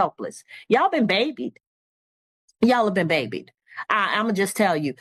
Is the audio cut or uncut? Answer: uncut